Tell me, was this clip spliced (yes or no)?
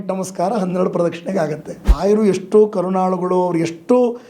yes